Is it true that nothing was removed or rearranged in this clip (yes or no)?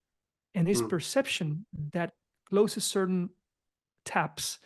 yes